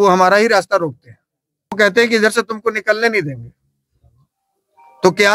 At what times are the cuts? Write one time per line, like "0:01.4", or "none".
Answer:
0:01.8